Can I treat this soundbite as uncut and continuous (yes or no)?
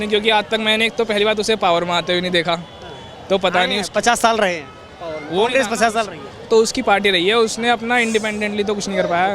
yes